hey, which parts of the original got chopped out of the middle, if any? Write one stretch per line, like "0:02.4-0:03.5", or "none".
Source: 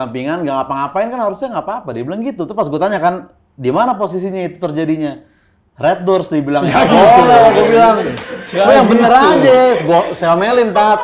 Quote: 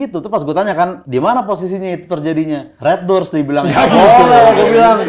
0:03.2-0:03.5
0:05.2-0:05.7